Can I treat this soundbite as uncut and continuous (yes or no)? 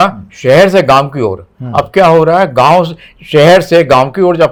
yes